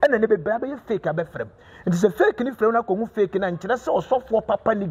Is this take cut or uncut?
uncut